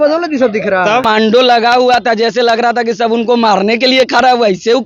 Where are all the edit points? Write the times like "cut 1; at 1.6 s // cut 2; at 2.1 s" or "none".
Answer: cut 1; at 1.0 s